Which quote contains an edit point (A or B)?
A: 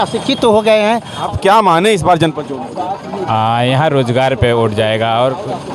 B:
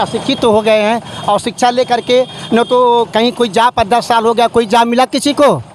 A